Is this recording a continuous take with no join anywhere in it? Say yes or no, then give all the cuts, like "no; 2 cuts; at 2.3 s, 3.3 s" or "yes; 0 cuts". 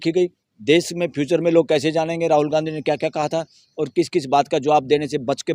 yes; 0 cuts